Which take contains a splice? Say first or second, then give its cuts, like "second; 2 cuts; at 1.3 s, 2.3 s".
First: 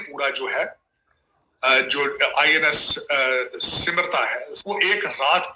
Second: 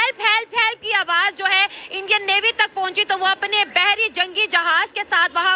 first; 1 cut; at 4.5 s